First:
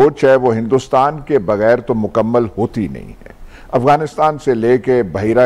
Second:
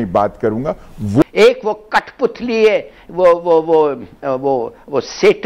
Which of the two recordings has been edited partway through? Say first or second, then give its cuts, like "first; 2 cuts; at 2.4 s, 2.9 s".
second; 1 cut; at 1.2 s